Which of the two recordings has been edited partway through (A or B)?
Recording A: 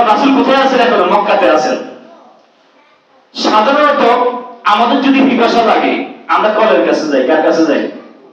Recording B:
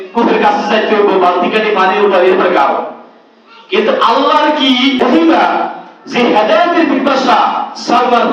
B